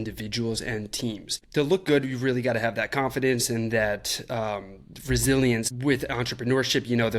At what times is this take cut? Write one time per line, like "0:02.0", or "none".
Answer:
0:01.3
0:05.7